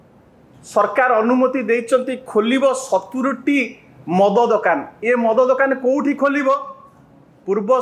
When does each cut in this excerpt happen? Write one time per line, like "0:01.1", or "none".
none